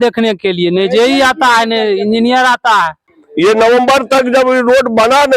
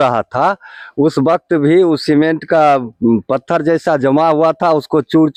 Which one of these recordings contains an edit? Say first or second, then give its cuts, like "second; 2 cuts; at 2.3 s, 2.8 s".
first; 1 cut; at 3.1 s